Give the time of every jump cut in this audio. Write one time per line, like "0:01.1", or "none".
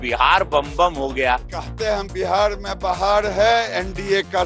0:01.4